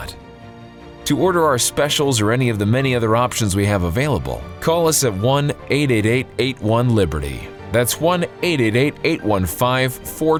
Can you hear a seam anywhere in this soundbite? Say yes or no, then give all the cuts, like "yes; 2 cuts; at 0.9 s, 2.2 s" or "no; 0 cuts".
no; 0 cuts